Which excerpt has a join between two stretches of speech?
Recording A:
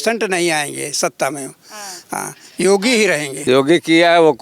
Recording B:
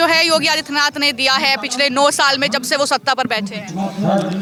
A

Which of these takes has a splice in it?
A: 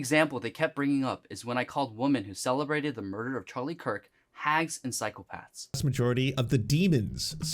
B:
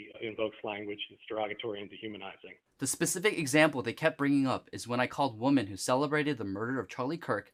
A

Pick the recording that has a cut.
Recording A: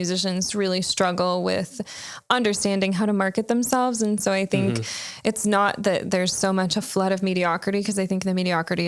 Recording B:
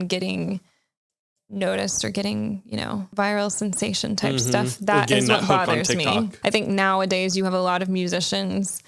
B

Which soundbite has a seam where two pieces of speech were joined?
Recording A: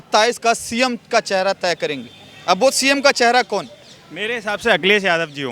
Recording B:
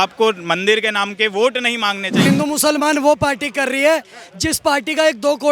B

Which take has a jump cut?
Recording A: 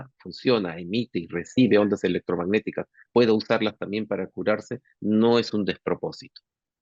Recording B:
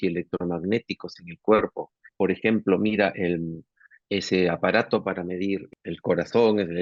B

